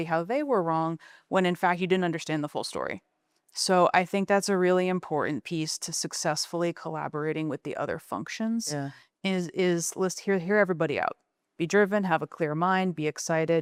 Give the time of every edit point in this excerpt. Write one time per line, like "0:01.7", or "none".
none